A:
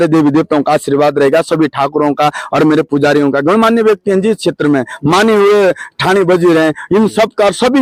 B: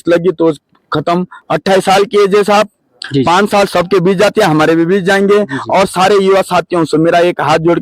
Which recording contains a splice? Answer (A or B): B